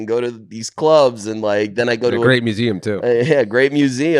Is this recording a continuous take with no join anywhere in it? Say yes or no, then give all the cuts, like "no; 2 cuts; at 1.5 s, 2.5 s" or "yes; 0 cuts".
yes; 0 cuts